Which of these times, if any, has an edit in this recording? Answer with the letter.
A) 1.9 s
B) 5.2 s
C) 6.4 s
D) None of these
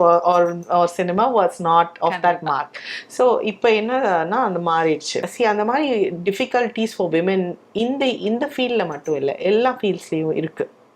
B